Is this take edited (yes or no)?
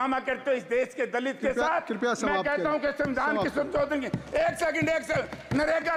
no